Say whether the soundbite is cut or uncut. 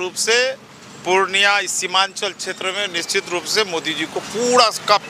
uncut